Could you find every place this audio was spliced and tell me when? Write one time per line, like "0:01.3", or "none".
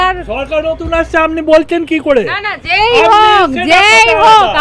none